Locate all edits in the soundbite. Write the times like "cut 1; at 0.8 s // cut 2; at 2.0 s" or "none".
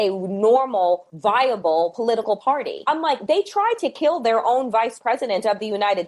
cut 1; at 2.7 s